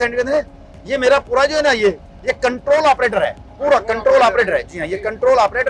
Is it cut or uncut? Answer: uncut